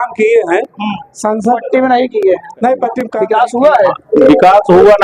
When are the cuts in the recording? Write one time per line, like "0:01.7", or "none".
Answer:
0:03.1